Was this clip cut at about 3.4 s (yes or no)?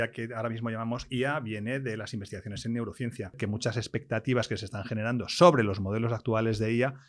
yes